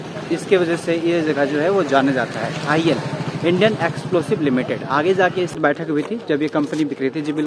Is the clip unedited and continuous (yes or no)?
no